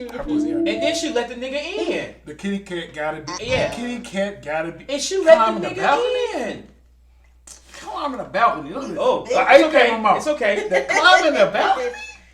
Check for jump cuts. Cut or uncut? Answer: uncut